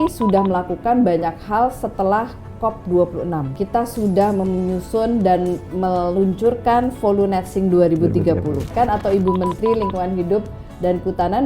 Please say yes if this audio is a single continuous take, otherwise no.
no